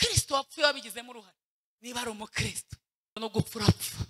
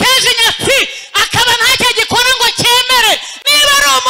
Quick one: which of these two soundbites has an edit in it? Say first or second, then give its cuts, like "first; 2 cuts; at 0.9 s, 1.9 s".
first; 1 cut; at 3.2 s